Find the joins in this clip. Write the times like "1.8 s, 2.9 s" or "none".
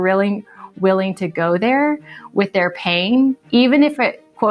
none